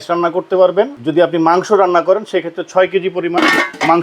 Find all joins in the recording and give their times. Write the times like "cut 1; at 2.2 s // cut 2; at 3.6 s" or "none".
cut 1; at 1.0 s